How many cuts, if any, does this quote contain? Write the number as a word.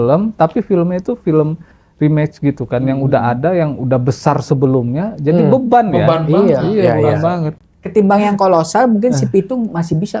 one